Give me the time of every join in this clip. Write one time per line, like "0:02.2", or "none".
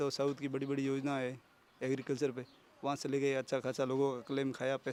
none